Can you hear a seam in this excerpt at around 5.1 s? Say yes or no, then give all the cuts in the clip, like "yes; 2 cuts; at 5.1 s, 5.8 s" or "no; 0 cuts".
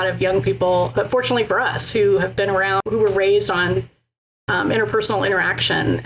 no; 2 cuts; at 0.9 s, 2.8 s